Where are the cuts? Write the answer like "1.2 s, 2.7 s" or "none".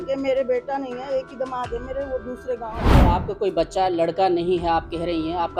3.0 s